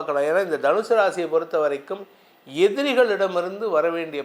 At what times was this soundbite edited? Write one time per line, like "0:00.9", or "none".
none